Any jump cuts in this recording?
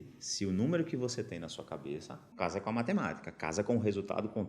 yes; 1 cut; at 2.3 s

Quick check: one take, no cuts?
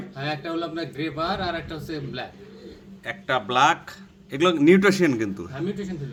yes; 0 cuts

